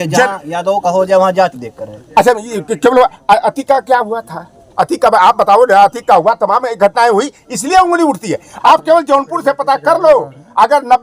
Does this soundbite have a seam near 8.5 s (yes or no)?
yes